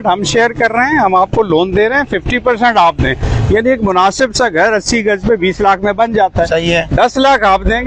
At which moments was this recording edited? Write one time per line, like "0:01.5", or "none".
none

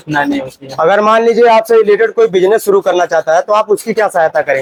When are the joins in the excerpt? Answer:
none

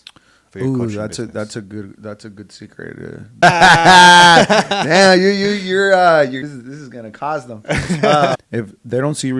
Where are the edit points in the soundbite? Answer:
0:03.4
0:06.4
0:08.4

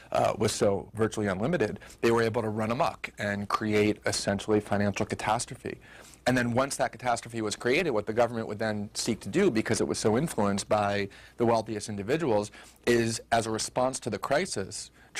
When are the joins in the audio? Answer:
0:03.1

